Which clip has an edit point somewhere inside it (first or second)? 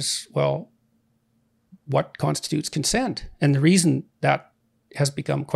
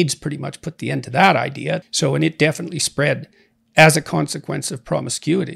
second